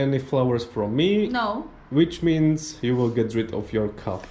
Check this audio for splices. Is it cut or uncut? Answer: uncut